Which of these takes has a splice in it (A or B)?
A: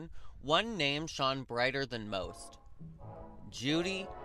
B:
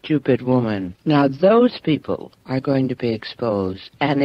B